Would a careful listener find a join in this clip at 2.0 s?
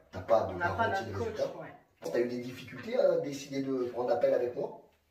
yes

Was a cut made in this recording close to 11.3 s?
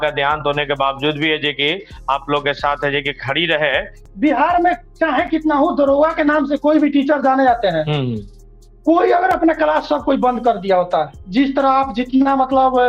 no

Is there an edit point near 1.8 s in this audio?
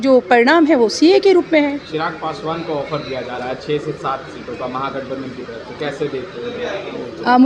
no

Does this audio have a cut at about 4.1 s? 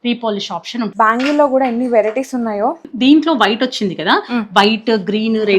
no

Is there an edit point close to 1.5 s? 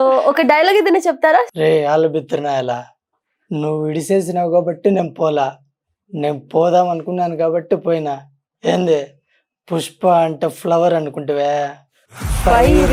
yes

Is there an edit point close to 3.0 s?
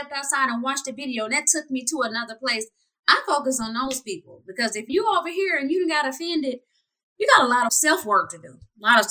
no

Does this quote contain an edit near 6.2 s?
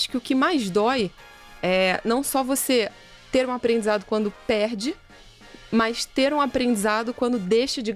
no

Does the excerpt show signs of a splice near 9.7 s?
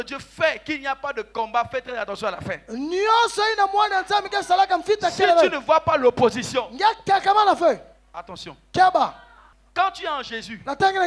yes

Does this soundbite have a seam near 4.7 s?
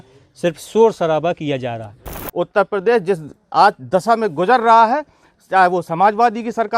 no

